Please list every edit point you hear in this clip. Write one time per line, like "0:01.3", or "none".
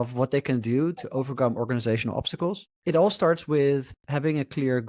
0:02.7